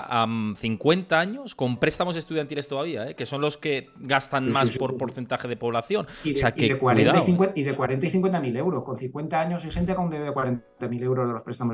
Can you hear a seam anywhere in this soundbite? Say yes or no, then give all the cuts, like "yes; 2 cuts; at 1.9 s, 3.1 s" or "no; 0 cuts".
no; 0 cuts